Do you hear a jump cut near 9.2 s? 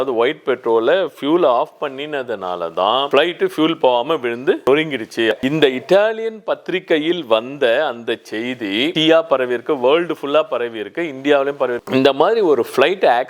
no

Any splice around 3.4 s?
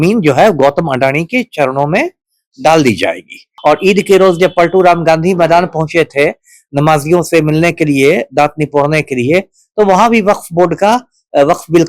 yes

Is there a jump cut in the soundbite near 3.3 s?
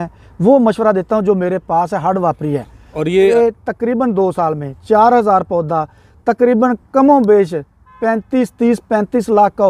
yes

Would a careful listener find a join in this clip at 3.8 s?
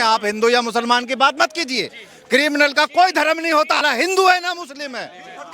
yes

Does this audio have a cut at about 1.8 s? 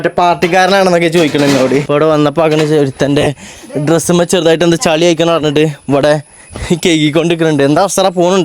yes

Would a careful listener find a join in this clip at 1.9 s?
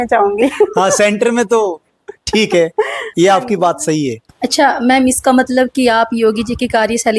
no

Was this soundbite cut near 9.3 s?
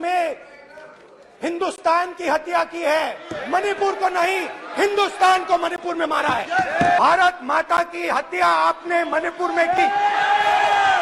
no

